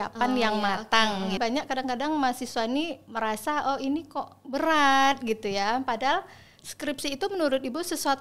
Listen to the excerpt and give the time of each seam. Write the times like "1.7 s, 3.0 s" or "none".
1.4 s

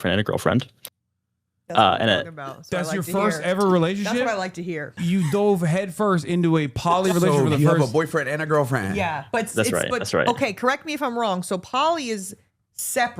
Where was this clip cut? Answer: 5.0 s

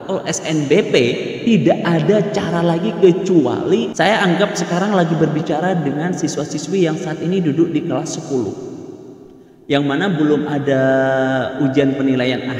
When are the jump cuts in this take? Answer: 3.9 s

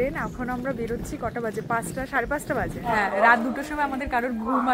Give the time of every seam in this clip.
2.9 s

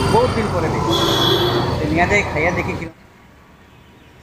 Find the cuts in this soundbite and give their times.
2.8 s

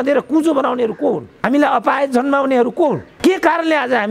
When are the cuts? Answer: 1.3 s, 3.1 s

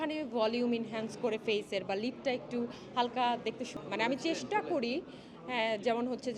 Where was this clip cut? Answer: 3.7 s

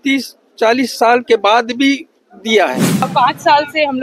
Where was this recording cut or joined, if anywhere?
3.1 s

